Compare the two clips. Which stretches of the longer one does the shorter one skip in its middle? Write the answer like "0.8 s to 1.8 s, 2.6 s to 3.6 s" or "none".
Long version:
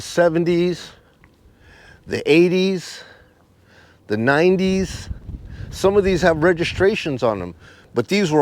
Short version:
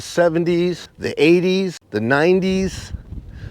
0.9 s to 2.0 s, 2.9 s to 4.0 s